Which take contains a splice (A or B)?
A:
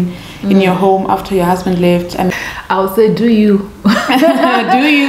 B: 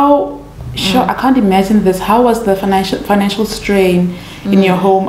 A